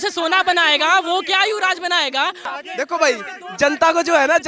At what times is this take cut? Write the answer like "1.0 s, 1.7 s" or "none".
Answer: 2.5 s